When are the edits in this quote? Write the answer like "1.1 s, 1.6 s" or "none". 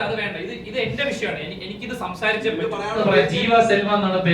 3.0 s